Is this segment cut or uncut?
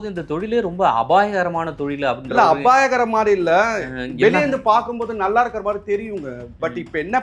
uncut